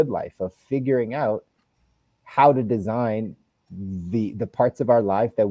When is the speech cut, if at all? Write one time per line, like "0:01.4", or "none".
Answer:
none